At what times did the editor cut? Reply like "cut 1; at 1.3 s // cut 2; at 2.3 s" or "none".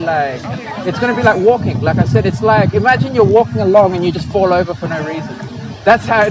none